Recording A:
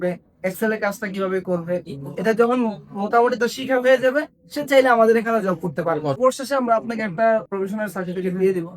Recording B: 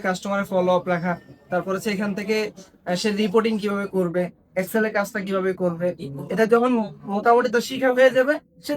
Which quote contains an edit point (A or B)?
A